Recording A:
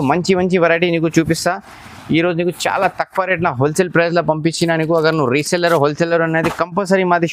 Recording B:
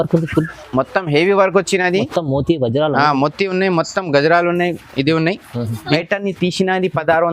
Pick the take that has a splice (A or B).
B